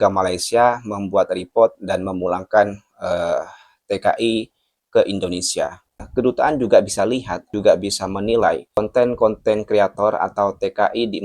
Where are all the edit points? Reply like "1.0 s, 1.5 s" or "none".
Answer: 6.0 s, 7.5 s, 8.8 s

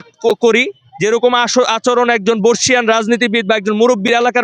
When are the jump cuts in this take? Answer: none

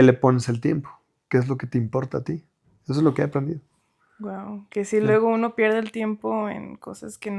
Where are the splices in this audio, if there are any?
none

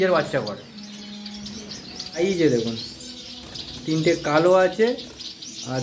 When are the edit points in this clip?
2.2 s

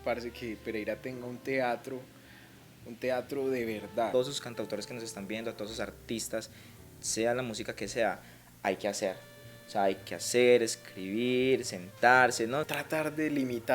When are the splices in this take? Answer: 4.1 s, 12.7 s

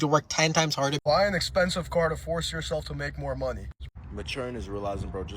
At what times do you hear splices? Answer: 1.0 s, 3.8 s

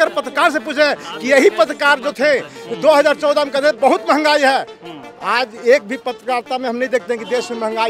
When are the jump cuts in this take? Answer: none

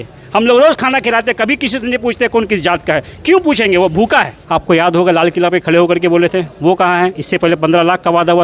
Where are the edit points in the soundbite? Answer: 4.4 s

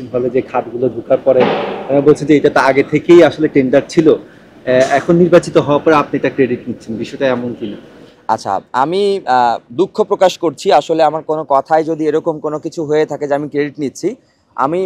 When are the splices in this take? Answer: none

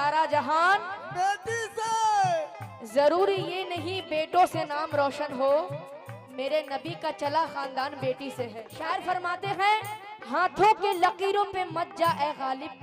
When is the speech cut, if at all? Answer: 8.6 s

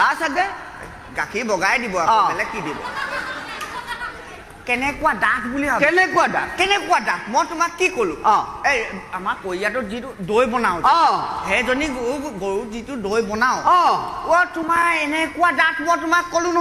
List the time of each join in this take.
none

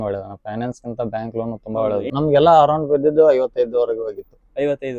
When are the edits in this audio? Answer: 2.1 s

